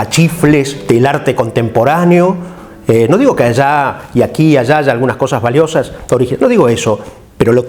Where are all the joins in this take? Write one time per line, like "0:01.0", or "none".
none